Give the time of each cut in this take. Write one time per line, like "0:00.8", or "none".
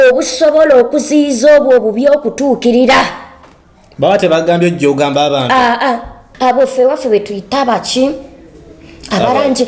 0:06.2